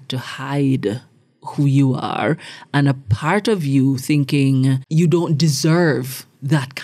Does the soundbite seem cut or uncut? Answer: uncut